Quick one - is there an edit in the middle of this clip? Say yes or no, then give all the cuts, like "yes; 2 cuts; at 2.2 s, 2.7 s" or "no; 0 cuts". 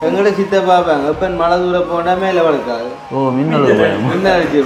no; 0 cuts